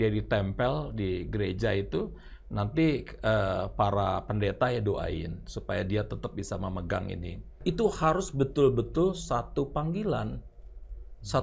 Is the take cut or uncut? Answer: cut